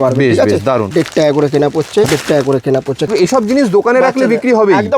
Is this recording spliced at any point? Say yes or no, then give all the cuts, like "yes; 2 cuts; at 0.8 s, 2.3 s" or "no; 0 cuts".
yes; 3 cuts; at 0.9 s, 2.1 s, 3.1 s